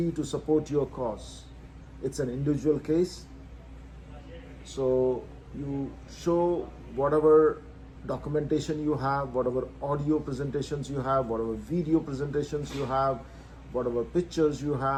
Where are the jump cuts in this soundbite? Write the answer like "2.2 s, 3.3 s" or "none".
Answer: none